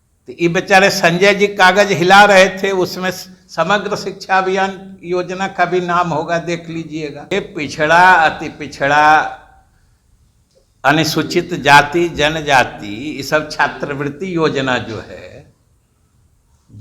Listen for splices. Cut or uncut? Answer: cut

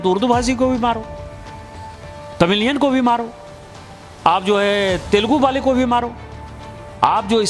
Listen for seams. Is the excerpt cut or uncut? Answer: uncut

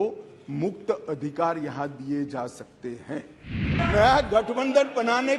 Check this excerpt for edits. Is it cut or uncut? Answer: cut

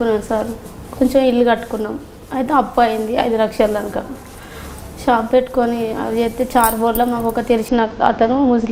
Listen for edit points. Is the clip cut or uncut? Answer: uncut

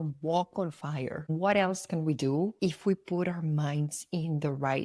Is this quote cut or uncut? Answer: cut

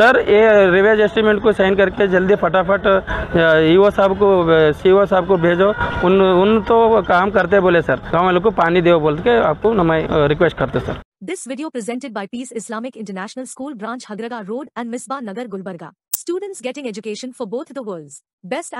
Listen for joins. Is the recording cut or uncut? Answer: cut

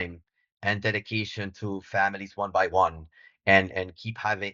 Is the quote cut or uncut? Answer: uncut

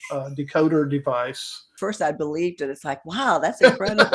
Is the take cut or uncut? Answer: cut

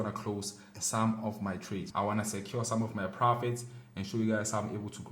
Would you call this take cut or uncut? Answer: cut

